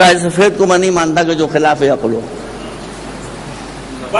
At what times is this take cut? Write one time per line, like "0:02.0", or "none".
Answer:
0:02.1